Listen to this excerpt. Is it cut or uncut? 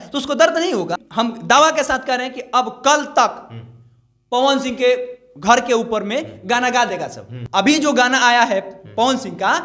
cut